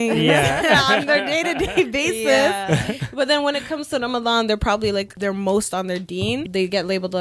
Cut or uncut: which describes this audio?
cut